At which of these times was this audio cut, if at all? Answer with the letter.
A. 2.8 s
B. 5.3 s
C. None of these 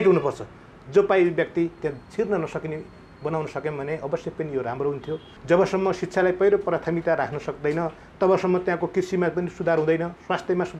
B